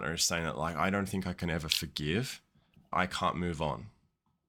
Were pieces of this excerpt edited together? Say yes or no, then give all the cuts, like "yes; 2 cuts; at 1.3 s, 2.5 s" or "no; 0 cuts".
no; 0 cuts